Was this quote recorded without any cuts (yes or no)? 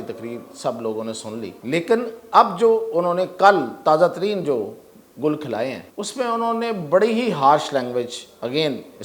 no